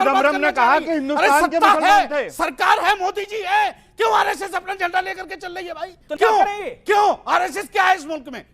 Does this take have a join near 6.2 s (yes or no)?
yes